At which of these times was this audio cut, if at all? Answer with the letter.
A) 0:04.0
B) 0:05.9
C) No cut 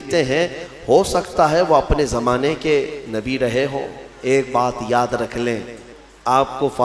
B